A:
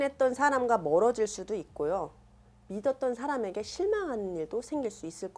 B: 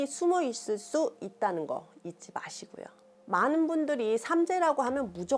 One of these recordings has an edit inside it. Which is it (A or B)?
B